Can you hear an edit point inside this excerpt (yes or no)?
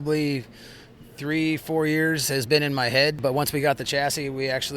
yes